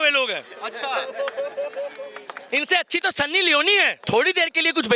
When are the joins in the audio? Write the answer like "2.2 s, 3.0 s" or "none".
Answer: 4.0 s